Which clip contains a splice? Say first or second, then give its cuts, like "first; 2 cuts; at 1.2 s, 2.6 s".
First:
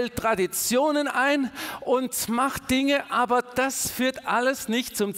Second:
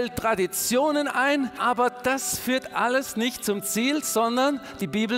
second; 1 cut; at 1.6 s